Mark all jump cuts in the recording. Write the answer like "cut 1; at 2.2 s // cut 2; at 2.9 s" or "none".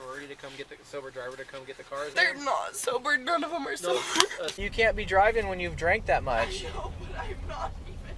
cut 1; at 2.1 s // cut 2; at 4.6 s